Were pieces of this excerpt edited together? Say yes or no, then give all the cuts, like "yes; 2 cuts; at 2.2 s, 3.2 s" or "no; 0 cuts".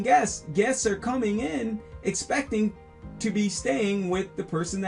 no; 0 cuts